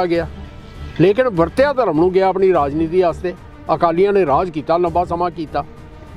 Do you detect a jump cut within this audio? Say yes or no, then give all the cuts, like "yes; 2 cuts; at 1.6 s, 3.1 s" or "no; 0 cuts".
no; 0 cuts